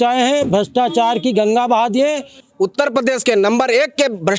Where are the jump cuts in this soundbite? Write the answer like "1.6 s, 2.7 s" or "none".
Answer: 2.3 s